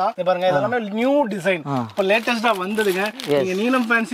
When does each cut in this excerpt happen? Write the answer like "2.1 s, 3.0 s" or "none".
none